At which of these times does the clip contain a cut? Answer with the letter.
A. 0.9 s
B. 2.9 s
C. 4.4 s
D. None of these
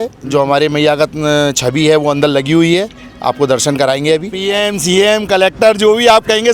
C